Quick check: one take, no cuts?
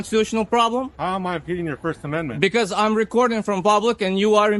yes; 0 cuts

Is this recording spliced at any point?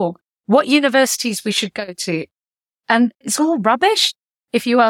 yes; 1 cut; at 3.2 s

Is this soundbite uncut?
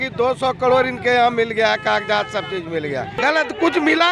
no; 1 cut; at 3.2 s

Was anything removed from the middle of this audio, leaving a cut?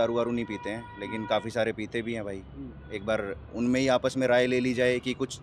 no; 0 cuts

